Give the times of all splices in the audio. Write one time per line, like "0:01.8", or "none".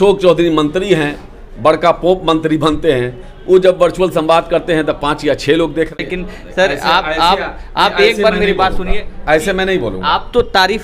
0:05.9